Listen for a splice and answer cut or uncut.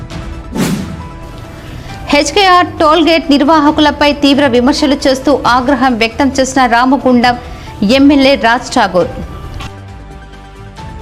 uncut